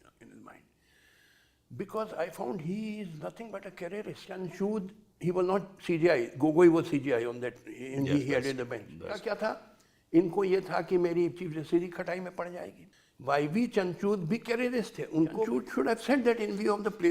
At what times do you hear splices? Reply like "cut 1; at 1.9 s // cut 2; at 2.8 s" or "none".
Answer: cut 1; at 4.4 s // cut 2; at 9.3 s // cut 3; at 15.5 s